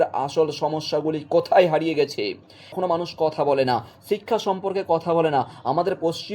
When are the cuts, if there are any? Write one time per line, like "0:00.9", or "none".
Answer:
0:02.8

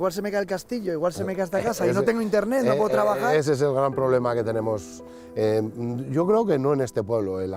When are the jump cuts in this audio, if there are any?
none

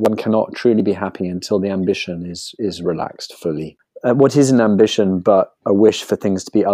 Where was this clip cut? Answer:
0:03.8

